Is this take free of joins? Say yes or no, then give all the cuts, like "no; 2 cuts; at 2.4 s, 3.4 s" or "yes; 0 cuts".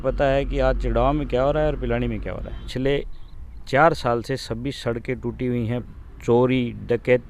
no; 2 cuts; at 2.6 s, 5.9 s